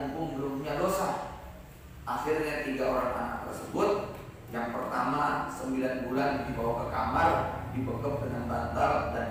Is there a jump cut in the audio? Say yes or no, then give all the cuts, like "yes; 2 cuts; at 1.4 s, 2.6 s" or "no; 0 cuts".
no; 0 cuts